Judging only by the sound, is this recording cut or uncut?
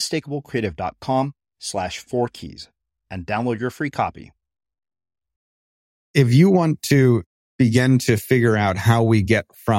cut